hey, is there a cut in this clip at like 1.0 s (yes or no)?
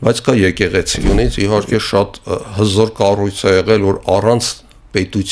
yes